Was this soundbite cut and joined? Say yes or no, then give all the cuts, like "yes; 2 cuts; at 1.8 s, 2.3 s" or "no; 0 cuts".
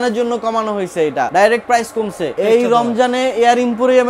yes; 2 cuts; at 1.3 s, 2.3 s